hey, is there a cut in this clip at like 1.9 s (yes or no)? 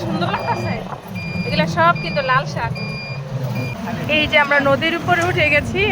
no